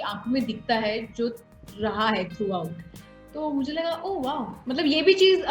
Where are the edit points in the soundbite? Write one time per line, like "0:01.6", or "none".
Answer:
0:04.6

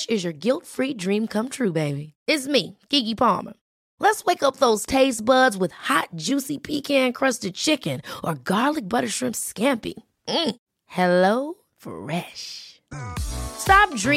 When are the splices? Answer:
none

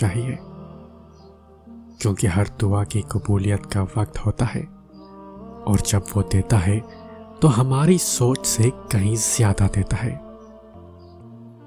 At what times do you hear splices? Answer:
0:10.1

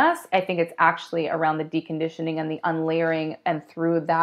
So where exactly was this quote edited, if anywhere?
none

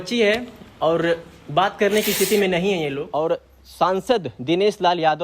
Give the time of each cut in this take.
0:03.0

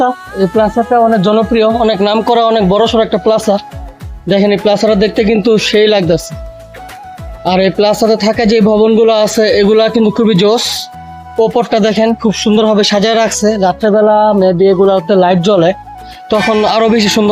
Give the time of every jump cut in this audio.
none

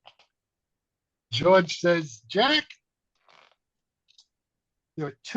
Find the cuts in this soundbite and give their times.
0:01.3

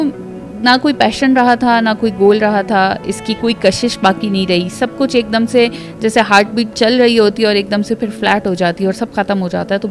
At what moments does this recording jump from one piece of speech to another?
none

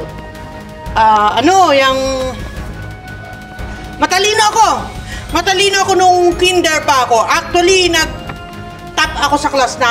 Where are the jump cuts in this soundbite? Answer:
none

